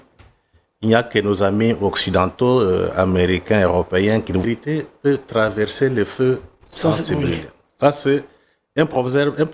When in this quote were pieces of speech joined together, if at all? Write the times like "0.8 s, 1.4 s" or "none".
4.4 s